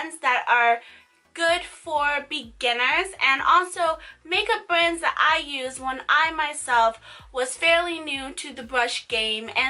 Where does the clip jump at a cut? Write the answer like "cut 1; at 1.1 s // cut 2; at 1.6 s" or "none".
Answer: cut 1; at 6.2 s